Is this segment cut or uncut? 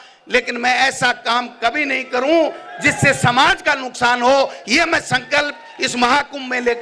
uncut